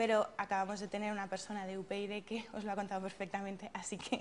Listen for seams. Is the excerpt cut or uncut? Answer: uncut